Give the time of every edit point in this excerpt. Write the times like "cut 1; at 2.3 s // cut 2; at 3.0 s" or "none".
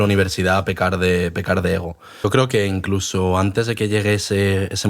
cut 1; at 2.2 s